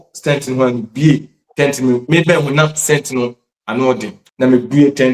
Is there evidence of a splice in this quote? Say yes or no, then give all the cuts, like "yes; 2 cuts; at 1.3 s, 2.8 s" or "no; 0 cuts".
yes; 1 cut; at 4.2 s